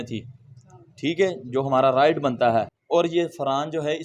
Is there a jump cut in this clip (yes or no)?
yes